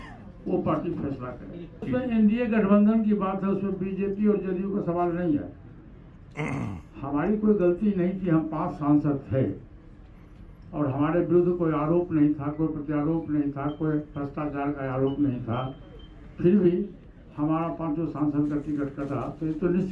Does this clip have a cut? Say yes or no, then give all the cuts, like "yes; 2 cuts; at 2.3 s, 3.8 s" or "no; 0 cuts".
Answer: yes; 1 cut; at 1.9 s